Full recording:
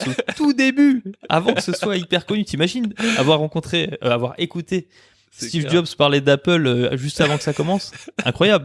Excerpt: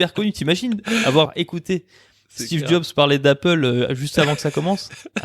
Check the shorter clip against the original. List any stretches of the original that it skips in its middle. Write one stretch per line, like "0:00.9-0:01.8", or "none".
0:03.4-0:04.3